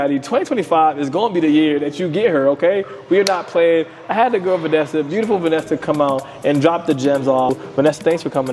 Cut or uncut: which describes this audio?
cut